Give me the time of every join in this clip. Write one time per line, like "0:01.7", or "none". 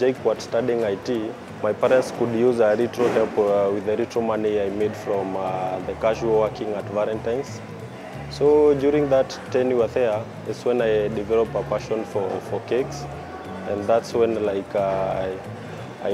0:01.4